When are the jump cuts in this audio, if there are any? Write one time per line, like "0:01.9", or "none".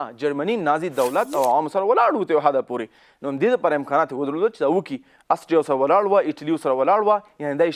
none